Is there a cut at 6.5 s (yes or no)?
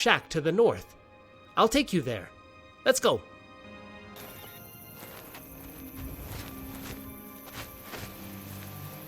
no